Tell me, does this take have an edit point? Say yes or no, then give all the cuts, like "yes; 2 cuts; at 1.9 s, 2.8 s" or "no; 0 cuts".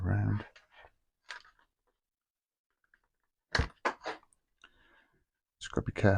no; 0 cuts